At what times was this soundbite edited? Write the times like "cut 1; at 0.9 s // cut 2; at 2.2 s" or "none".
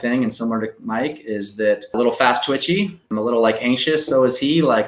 cut 1; at 1.9 s